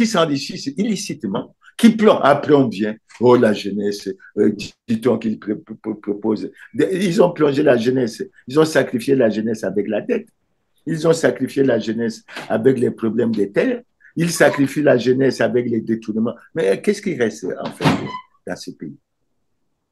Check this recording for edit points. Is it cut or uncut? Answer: uncut